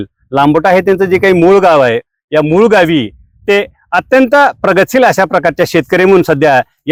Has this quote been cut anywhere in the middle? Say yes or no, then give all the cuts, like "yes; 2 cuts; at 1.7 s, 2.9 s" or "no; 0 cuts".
no; 0 cuts